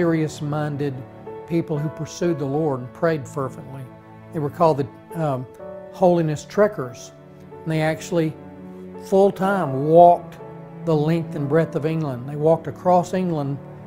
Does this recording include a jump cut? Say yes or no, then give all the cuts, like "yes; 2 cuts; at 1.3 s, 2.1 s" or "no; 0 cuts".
yes; 1 cut; at 9.2 s